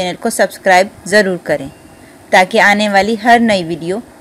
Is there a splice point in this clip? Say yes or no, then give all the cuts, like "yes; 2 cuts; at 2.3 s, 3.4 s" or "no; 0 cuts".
no; 0 cuts